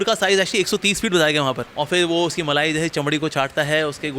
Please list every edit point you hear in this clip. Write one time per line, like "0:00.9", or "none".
0:01.7